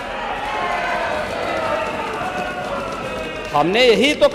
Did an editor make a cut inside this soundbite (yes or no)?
no